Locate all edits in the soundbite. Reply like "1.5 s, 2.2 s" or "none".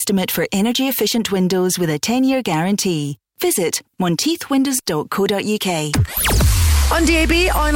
6.0 s